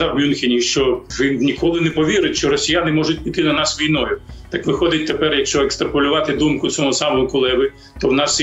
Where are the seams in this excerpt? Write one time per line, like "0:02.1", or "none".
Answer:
0:01.1